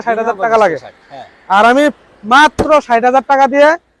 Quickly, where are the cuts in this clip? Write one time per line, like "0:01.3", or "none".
none